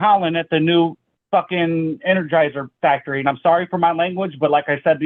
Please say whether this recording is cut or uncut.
uncut